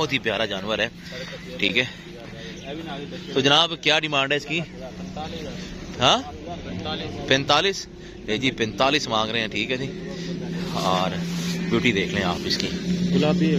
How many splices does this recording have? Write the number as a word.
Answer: zero